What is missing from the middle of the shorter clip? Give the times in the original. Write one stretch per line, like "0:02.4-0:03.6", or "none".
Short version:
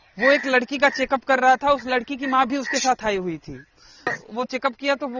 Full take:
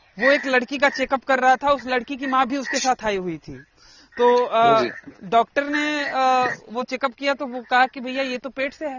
0:04.1-0:06.5